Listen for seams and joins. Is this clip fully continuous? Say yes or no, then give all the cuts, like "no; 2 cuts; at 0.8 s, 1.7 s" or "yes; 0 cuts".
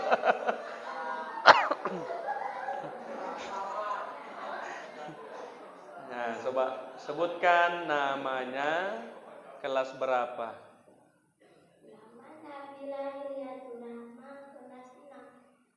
yes; 0 cuts